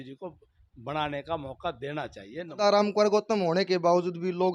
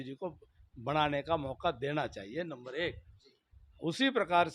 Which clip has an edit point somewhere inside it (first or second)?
first